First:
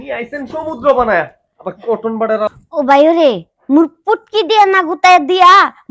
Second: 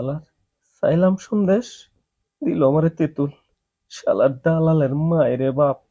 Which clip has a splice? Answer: first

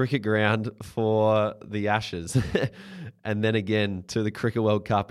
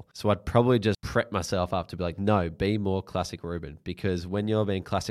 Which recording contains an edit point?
second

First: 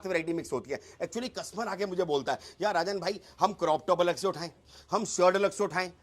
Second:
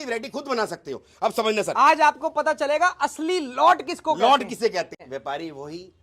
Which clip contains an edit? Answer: second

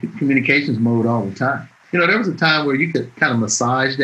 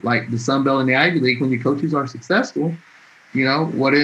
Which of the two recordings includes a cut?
first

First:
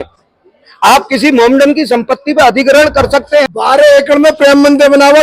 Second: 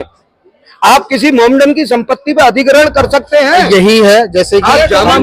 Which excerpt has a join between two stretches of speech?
first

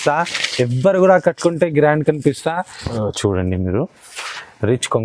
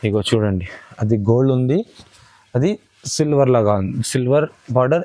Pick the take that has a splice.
first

